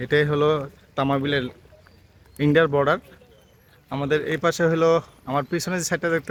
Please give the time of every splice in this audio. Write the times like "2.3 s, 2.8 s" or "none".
none

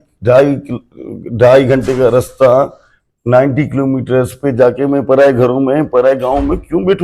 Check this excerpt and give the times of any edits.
none

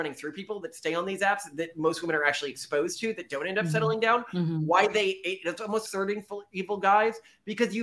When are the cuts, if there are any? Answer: none

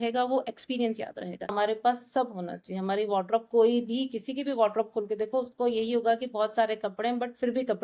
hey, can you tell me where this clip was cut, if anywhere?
1.4 s

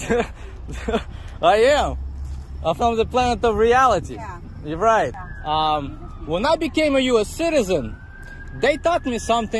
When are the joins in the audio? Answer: 5.3 s

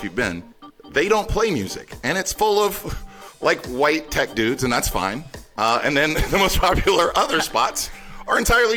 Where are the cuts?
none

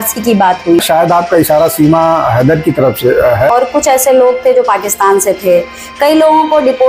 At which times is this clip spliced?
0.8 s, 3.5 s

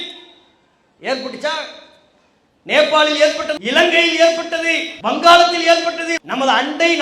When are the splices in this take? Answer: 3.6 s, 4.9 s, 6.1 s

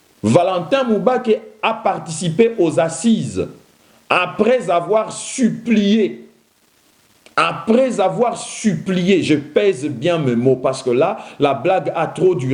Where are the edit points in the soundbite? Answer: none

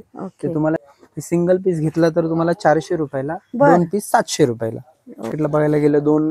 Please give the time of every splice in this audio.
0.8 s, 5.3 s

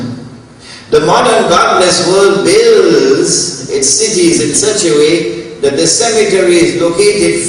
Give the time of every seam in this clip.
5.7 s

